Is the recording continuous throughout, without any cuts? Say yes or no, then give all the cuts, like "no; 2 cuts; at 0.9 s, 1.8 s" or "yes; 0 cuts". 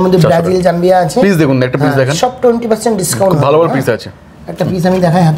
yes; 0 cuts